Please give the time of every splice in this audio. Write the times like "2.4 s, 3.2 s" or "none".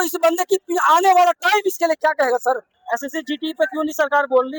2.7 s